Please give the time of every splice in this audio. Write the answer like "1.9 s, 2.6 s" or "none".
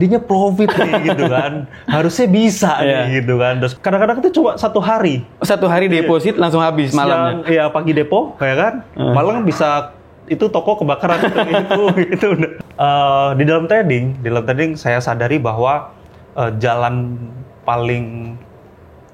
3.7 s, 12.6 s